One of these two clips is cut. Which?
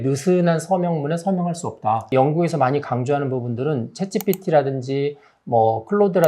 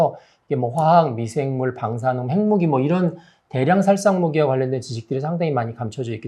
first; 1 cut; at 2.1 s

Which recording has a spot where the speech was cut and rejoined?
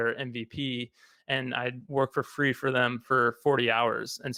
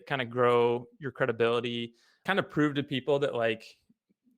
second; 1 cut; at 2.2 s

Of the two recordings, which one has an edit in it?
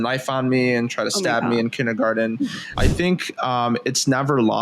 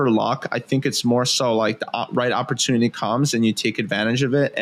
first; 1 cut; at 2.8 s

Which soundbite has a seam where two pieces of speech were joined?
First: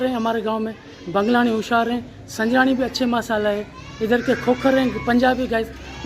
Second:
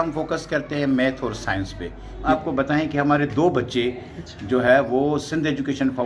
second; 1 cut; at 2.2 s

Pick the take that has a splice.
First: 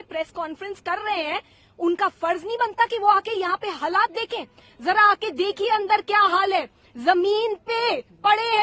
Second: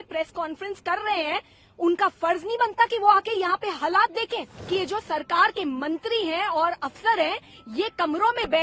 second; 1 cut; at 4.6 s

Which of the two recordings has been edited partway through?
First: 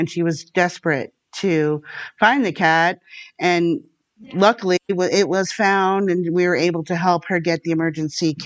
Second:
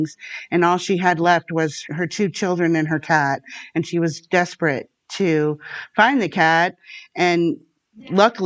second; 1 cut; at 1.8 s

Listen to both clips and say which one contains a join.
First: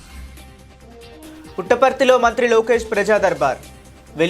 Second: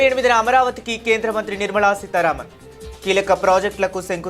first; 1 cut; at 1.2 s

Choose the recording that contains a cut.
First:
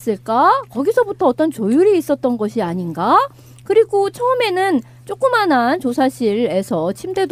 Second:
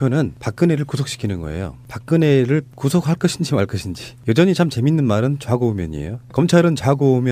first; 1 cut; at 5.3 s

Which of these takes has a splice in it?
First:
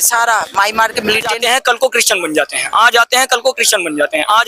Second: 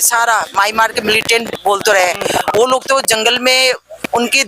first; 1 cut; at 1.4 s

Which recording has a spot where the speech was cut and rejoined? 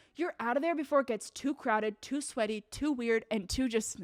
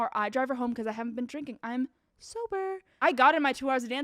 second; 1 cut; at 2.9 s

